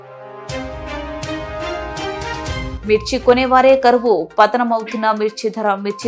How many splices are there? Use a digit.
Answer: 1